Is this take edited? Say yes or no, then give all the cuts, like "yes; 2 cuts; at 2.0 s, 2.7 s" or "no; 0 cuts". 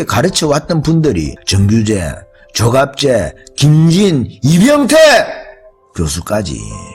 no; 0 cuts